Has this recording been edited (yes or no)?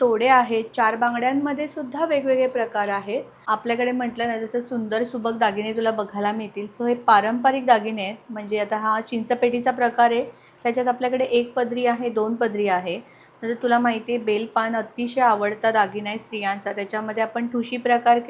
yes